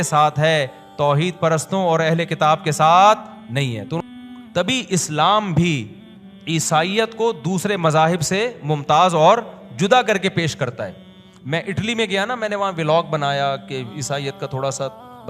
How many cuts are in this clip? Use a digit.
1